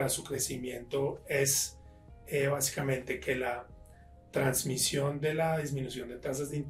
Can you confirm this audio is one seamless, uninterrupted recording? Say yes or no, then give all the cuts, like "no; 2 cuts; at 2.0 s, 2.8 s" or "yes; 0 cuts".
yes; 0 cuts